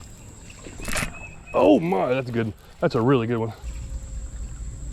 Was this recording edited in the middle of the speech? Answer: yes; 1 cut; at 3.6 s

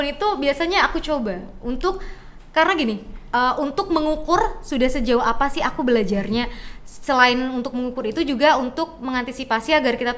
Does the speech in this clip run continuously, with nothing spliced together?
yes; 0 cuts

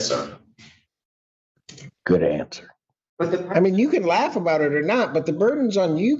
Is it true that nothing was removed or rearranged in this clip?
no; 1 cut; at 3.1 s

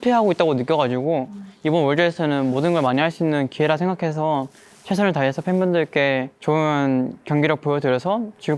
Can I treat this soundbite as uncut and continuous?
yes; 0 cuts

